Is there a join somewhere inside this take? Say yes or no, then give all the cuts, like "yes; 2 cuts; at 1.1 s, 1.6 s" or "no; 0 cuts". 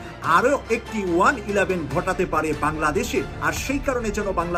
no; 0 cuts